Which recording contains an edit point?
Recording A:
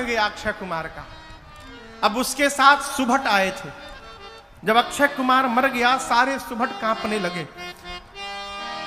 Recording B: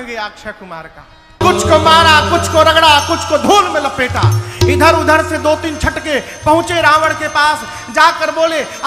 B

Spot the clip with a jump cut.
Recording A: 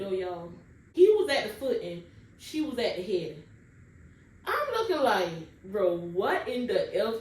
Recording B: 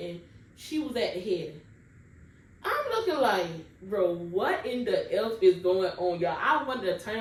A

